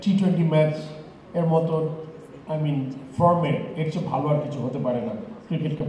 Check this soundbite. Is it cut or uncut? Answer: uncut